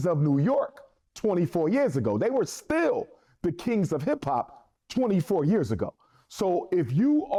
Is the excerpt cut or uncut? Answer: uncut